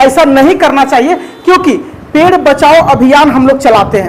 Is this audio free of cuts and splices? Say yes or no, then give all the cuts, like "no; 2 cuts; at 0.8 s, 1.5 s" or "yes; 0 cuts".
yes; 0 cuts